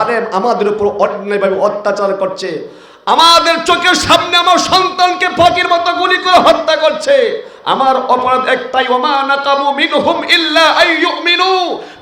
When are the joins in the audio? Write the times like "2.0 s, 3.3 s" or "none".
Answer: none